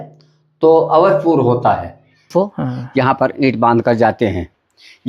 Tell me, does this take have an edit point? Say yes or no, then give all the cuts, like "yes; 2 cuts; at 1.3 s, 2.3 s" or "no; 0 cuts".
yes; 1 cut; at 2.3 s